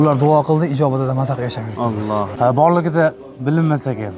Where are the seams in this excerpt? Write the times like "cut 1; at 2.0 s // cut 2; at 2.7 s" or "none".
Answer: cut 1; at 2.2 s

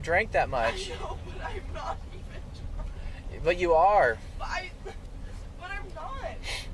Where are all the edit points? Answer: none

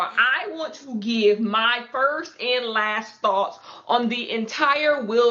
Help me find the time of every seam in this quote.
none

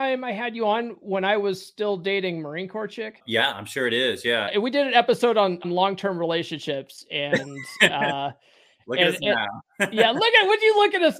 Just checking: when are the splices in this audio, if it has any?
cut 1; at 3.2 s // cut 2; at 4.5 s // cut 3; at 5.6 s

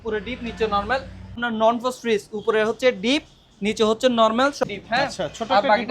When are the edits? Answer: cut 1; at 1.4 s // cut 2; at 4.6 s

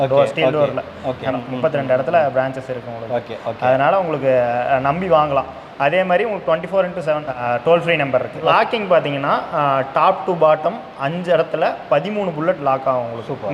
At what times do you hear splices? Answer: cut 1; at 1.3 s // cut 2; at 7.3 s // cut 3; at 8.5 s

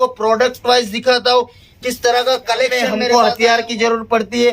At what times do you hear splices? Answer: cut 1; at 2.9 s

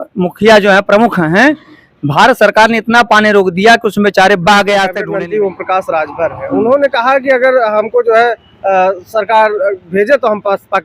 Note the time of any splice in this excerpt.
cut 1; at 5.0 s

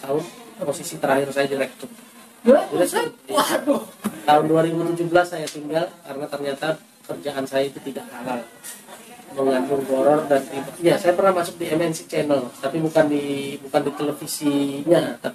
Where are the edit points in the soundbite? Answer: cut 1; at 10.7 s

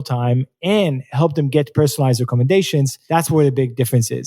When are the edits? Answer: cut 1; at 3.0 s

